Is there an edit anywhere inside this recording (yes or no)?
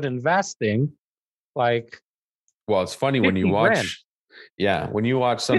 no